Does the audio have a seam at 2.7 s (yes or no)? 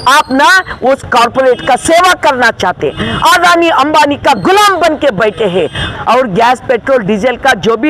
no